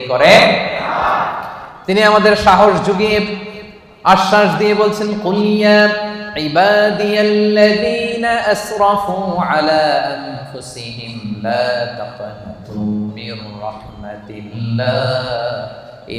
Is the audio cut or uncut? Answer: uncut